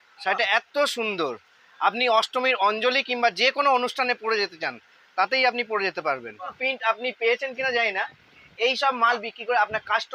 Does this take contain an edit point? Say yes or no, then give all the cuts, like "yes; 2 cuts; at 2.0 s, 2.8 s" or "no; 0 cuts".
yes; 1 cut; at 6.6 s